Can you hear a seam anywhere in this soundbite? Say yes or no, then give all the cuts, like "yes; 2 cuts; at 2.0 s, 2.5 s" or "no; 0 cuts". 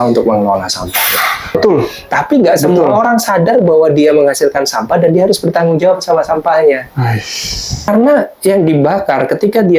yes; 2 cuts; at 1.6 s, 7.9 s